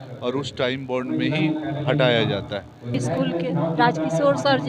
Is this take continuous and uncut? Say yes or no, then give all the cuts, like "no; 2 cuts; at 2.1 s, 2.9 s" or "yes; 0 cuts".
no; 1 cut; at 3.0 s